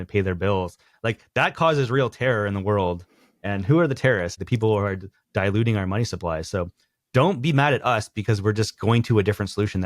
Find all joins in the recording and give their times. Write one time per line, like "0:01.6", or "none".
0:04.4